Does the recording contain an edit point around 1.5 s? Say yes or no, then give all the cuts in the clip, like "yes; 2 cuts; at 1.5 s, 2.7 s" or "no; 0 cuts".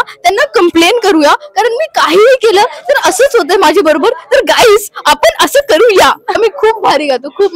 no; 1 cut; at 6.4 s